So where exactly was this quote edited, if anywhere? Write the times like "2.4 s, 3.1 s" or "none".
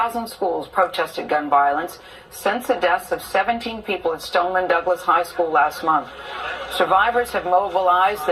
2.8 s